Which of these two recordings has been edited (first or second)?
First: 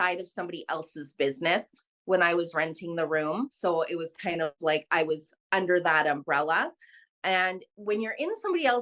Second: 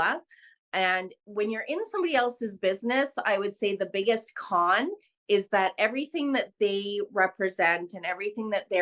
first